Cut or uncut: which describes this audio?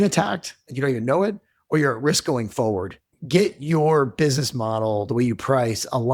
cut